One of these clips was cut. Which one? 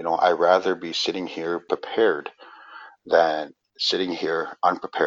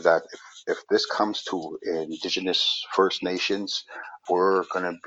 first; 1 cut; at 1.6 s

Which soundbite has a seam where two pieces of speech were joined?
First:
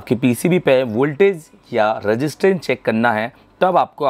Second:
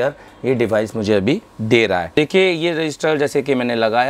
second; 1 cut; at 2.2 s

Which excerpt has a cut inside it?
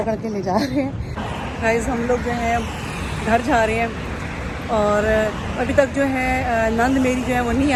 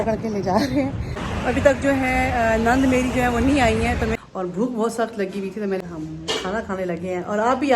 second; 3 cuts; at 1.3 s, 4.2 s, 5.8 s

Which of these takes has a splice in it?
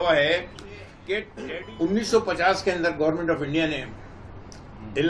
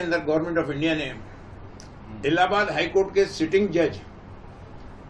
first; 1 cut; at 1.3 s

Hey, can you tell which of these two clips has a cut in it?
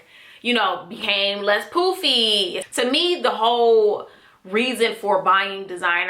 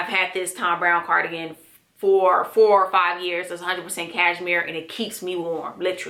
first; 1 cut; at 2.6 s

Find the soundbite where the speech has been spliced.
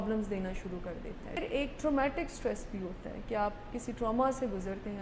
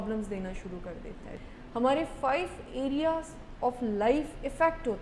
second; 1 cut; at 1.3 s

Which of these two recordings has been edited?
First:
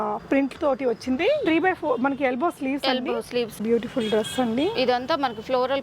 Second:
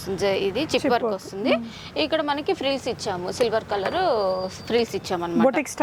first; 1 cut; at 3.6 s

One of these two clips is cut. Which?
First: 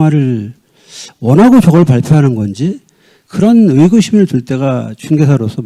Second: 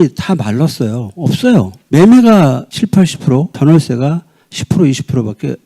second; 2 cuts; at 1.8 s, 2.7 s

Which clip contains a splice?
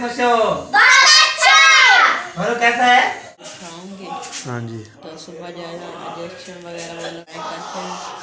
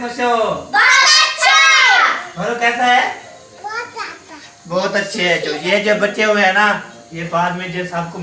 first; 2 cuts; at 3.5 s, 7.3 s

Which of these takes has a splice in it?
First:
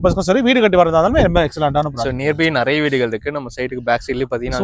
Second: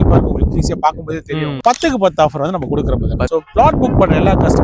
second; 2 cuts; at 1.6 s, 3.3 s

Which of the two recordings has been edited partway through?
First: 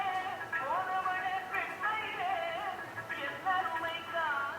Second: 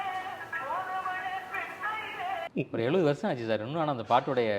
second; 1 cut; at 2.5 s

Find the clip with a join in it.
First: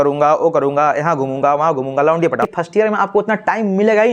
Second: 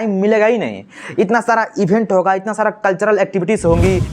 first; 1 cut; at 2.6 s

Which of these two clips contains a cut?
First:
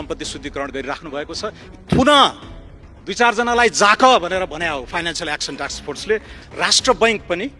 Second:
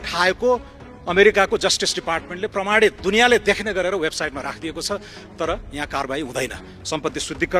first; 2 cuts; at 1.6 s, 6.4 s

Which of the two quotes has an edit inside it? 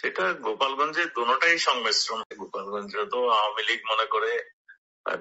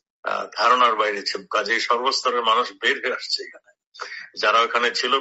first; 1 cut; at 2.3 s

